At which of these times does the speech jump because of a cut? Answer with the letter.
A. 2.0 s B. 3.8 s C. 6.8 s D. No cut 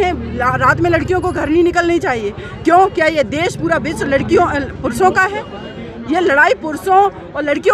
D